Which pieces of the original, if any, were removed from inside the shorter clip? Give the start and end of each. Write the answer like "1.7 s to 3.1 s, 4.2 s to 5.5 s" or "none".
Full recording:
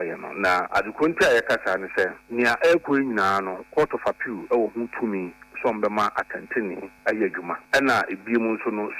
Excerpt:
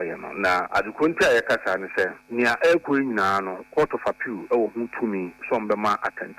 5.4 s to 5.5 s